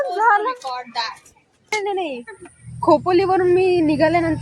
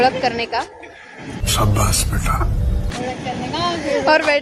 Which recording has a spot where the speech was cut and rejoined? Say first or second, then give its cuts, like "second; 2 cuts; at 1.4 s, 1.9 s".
first; 1 cut; at 1.7 s